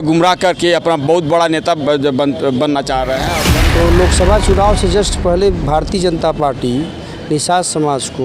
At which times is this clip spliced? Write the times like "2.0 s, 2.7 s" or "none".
3.4 s